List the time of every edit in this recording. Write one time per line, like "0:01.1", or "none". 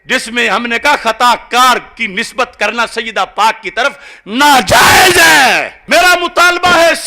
0:05.7